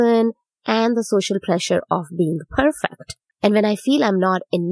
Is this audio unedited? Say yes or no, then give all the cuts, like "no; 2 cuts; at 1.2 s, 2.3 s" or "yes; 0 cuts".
no; 1 cut; at 3.2 s